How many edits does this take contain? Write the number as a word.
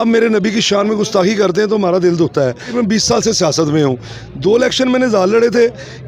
one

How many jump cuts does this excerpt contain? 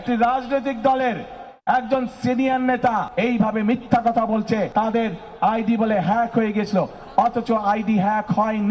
two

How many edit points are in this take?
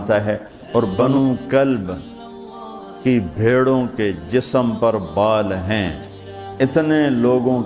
one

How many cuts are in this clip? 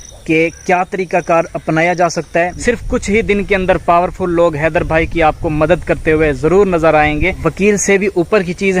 two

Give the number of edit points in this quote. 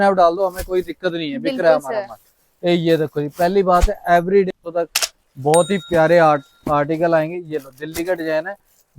one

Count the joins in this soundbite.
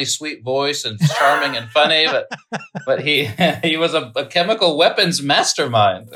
zero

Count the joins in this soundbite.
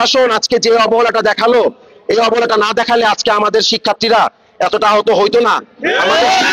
zero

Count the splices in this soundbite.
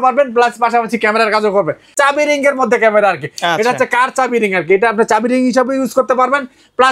one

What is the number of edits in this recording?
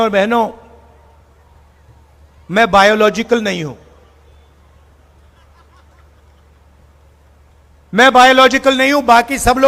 zero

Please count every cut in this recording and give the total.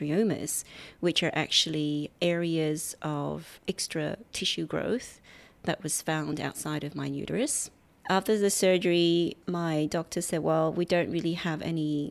four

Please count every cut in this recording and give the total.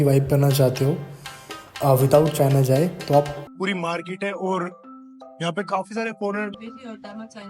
two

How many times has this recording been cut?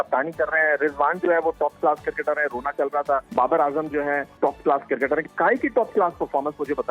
two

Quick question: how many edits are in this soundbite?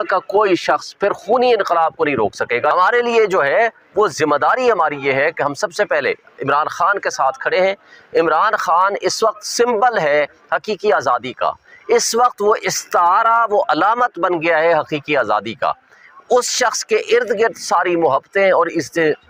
one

